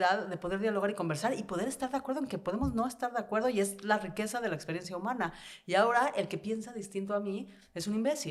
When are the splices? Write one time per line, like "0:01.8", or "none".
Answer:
none